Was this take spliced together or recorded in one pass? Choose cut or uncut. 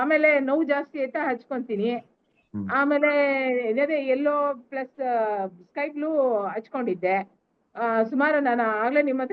uncut